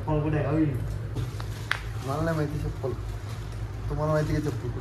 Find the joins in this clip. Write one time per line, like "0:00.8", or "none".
0:01.2